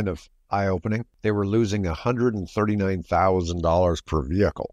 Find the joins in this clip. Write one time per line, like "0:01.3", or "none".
0:01.1